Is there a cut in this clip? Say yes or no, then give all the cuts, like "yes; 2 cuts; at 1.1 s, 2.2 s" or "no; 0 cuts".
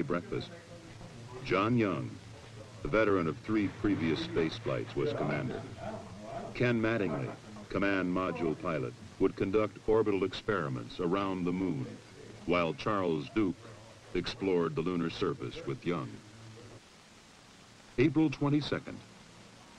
yes; 1 cut; at 17.8 s